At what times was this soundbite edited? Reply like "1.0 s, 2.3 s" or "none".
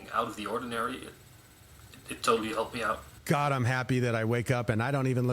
3.1 s

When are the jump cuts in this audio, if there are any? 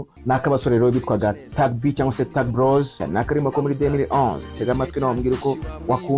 3.0 s

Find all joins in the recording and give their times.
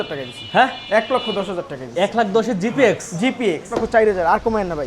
3.8 s

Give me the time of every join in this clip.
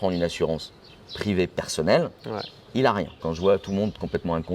3.2 s

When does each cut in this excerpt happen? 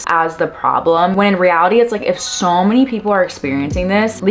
1.1 s

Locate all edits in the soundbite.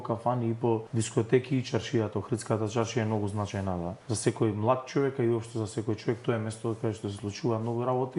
0.9 s, 4.0 s

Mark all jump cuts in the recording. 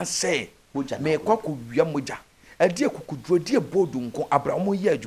none

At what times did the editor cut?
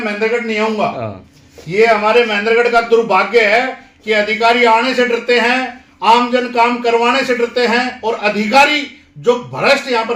none

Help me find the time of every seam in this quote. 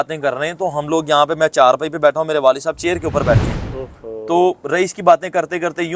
none

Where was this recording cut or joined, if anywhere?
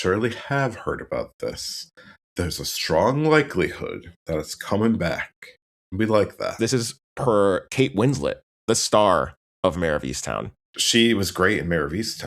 10.8 s

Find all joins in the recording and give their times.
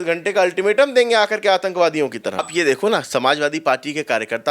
2.5 s

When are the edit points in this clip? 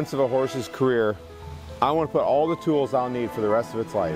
none

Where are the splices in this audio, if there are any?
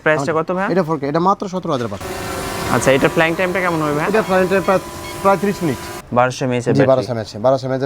2.0 s, 5.9 s

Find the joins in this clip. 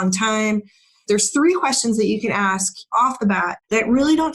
1.0 s, 3.2 s

